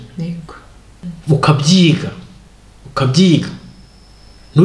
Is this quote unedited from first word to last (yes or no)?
no